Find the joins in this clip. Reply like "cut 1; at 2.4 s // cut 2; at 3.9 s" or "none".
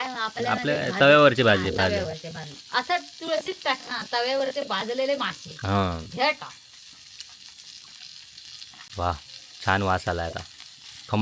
cut 1; at 8.9 s